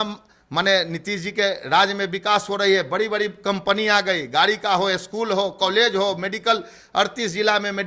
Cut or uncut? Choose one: uncut